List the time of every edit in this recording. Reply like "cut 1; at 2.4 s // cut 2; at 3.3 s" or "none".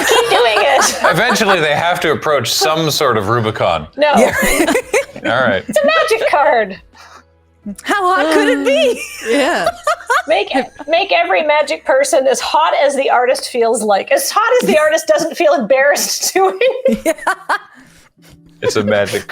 none